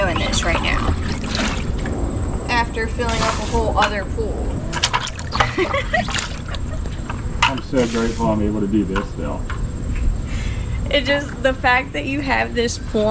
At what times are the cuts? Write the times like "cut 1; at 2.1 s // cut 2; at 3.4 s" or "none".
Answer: cut 1; at 4.6 s